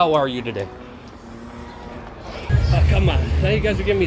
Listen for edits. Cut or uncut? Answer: cut